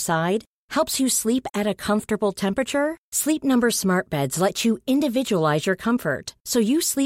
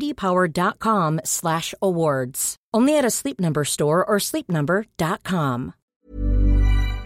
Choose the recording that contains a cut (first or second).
second